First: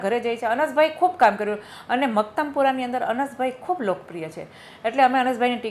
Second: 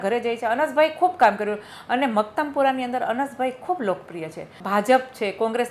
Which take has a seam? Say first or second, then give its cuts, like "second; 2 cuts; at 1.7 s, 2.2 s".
second; 1 cut; at 4.6 s